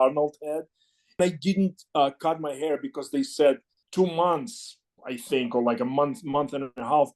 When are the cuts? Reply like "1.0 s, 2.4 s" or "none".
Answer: 1.2 s, 3.8 s